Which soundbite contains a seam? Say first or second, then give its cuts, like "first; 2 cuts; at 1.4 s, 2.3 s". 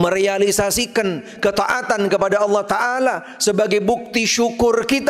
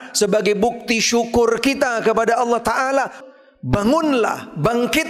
second; 1 cut; at 3.2 s